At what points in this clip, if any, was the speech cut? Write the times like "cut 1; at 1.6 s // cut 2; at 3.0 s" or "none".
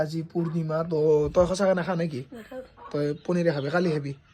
none